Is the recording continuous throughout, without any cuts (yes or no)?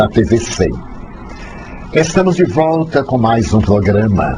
no